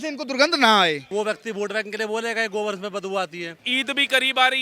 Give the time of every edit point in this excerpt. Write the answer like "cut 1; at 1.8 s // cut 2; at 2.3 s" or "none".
cut 1; at 1.0 s // cut 2; at 3.6 s